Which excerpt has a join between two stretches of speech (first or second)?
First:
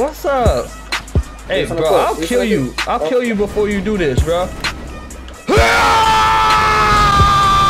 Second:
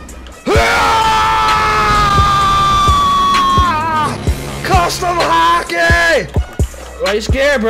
second